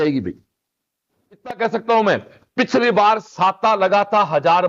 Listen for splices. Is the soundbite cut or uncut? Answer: cut